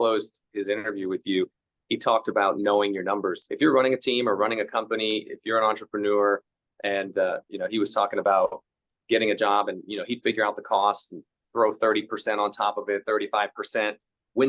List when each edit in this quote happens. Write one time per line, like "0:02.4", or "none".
0:03.4